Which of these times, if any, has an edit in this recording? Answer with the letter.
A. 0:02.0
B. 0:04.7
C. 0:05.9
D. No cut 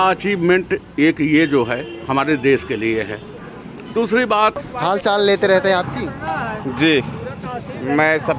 B